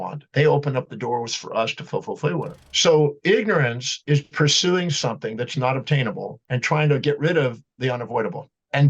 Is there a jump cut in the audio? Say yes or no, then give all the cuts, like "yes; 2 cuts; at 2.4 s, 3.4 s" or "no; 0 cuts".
yes; 1 cut; at 2.6 s